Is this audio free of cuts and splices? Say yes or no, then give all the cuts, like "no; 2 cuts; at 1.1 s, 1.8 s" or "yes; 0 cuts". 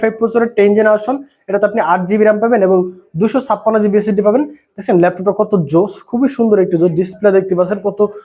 yes; 0 cuts